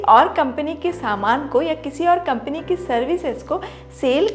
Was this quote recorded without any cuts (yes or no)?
yes